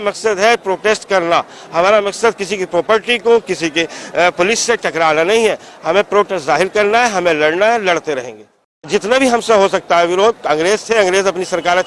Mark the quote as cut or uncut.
cut